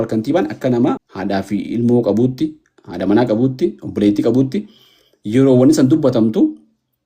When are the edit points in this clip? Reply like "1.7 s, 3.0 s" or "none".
1.1 s